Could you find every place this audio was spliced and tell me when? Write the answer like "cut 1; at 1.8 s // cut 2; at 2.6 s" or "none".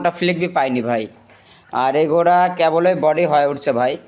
none